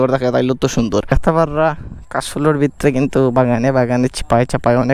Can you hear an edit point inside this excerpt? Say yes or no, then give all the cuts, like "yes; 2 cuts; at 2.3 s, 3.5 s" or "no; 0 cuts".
yes; 1 cut; at 1.1 s